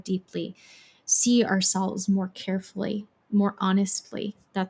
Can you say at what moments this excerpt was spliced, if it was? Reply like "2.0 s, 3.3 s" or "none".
none